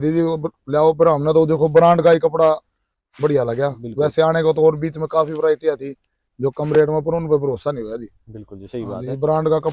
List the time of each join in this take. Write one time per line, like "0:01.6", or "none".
none